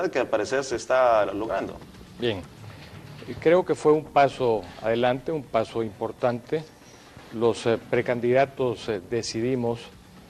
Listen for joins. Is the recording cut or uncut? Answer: uncut